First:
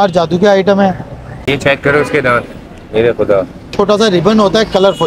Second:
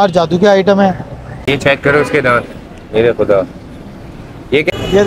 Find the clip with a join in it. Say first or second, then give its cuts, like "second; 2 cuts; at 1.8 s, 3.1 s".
first; 1 cut; at 3.7 s